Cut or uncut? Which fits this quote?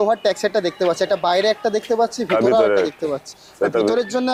uncut